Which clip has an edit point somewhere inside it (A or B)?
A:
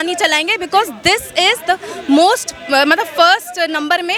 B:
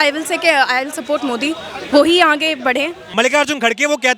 B